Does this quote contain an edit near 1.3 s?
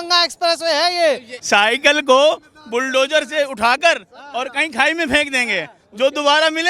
yes; 1 cut; at 1.3 s

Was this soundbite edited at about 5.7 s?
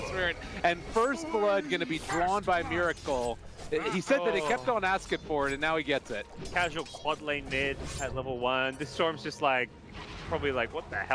no; 0 cuts

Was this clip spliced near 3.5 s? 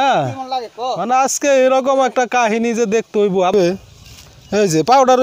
yes; 1 cut; at 3.5 s

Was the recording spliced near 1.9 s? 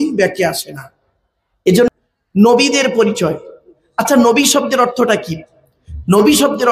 yes; 1 cut; at 1.9 s

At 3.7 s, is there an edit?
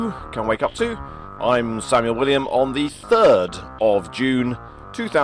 yes; 1 cut; at 3.7 s

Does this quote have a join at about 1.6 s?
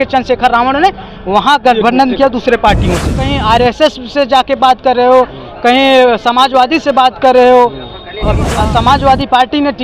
no; 2 cuts; at 3.3 s, 8.5 s

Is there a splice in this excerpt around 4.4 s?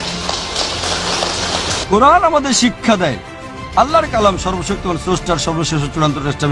no; 1 cut; at 1.8 s

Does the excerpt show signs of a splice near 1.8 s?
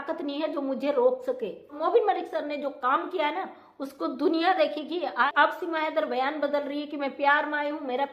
yes; 2 cuts; at 1.8 s, 5.3 s

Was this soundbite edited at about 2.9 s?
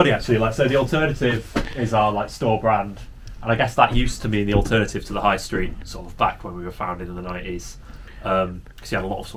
no; 0 cuts

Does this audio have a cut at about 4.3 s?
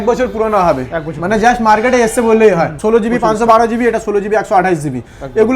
no; 1 cut; at 2.8 s

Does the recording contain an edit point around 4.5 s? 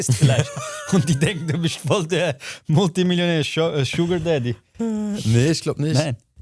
no; 0 cuts

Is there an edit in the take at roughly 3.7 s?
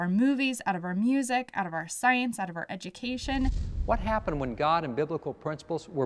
yes; 1 cut; at 3.7 s

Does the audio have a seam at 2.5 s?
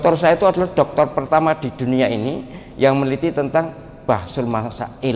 no; 0 cuts

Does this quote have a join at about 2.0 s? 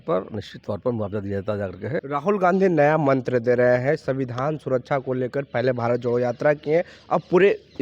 yes; 1 cut; at 2.0 s

